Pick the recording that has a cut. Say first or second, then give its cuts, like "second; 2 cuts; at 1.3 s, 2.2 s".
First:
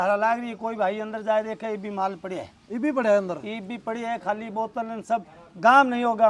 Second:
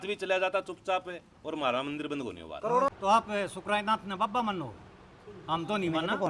second; 1 cut; at 2.9 s